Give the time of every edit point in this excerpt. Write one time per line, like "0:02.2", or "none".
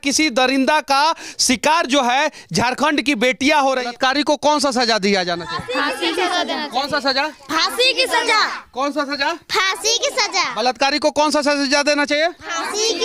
0:03.9